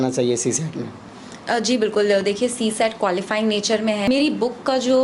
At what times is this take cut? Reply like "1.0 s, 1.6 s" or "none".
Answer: 4.1 s